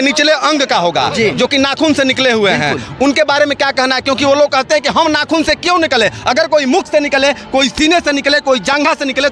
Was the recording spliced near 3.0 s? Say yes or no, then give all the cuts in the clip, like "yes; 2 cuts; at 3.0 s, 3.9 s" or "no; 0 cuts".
no; 0 cuts